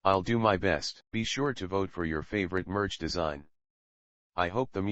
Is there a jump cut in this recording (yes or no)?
yes